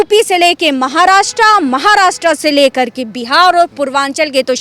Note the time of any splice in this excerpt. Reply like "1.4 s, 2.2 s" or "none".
none